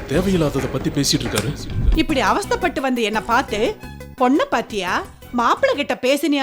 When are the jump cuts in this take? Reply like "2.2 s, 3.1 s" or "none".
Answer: 1.7 s

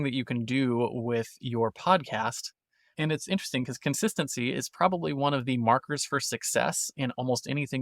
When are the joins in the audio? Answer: none

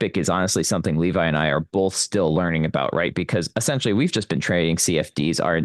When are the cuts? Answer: none

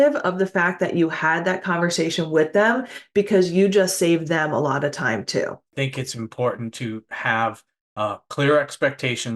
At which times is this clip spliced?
5.7 s

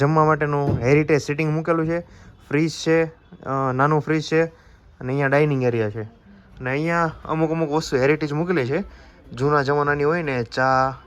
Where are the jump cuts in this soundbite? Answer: none

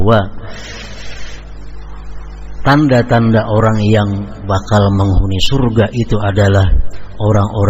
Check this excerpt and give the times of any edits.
none

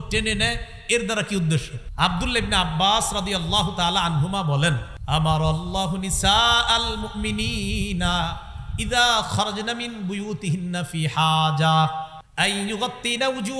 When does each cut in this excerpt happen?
1.8 s, 4.9 s, 12.2 s

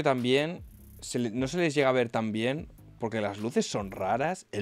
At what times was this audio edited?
none

